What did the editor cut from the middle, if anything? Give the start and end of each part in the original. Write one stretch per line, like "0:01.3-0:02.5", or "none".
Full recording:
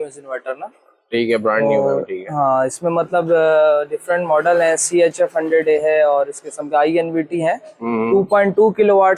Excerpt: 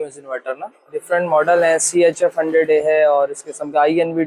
0:01.0-0:03.9